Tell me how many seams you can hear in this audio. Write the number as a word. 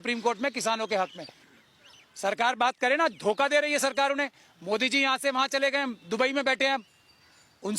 one